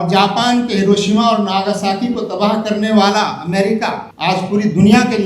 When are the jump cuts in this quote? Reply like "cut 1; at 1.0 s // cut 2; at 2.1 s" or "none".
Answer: cut 1; at 4.1 s